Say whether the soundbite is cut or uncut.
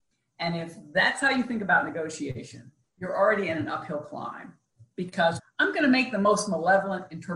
cut